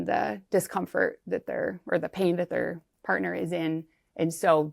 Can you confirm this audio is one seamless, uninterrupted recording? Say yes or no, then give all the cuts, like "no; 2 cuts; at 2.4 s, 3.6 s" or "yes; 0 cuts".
yes; 0 cuts